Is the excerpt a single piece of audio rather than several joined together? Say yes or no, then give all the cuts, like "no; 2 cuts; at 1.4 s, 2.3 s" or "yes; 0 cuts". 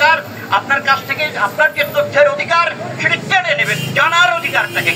yes; 0 cuts